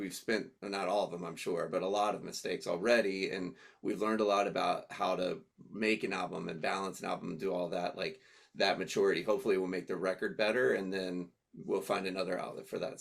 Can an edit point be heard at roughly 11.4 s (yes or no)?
no